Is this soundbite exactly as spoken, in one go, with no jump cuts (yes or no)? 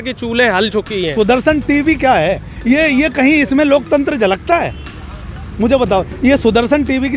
no